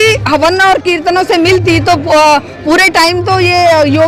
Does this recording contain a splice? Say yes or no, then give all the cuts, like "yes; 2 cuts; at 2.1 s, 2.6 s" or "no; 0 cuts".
no; 0 cuts